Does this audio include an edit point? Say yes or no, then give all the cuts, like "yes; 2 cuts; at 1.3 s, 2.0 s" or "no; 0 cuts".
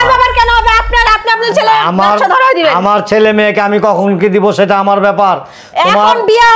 no; 0 cuts